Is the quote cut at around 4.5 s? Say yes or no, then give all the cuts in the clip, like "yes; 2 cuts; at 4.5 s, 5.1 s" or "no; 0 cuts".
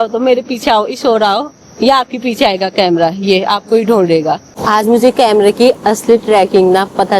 yes; 1 cut; at 4.5 s